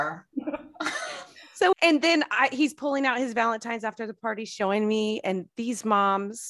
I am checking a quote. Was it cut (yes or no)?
no